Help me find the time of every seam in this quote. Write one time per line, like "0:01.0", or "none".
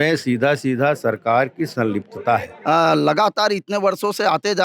0:02.5